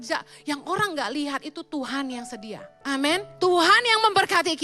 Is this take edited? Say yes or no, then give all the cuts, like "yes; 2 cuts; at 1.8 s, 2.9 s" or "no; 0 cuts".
yes; 1 cut; at 3.1 s